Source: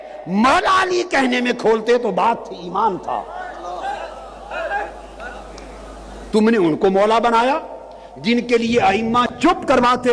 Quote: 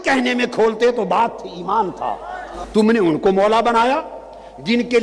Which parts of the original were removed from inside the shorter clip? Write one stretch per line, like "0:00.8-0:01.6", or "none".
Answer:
0:03.6-0:06.2